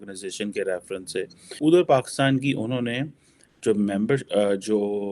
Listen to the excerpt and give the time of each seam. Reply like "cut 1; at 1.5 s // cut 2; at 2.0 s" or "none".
cut 1; at 1.5 s